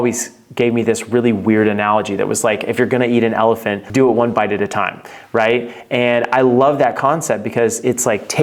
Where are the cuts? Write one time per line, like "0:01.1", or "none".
0:03.8